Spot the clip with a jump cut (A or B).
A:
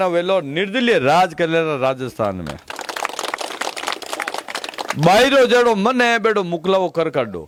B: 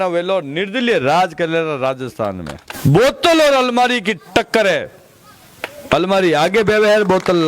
B